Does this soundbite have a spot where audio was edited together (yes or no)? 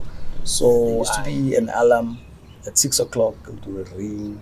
yes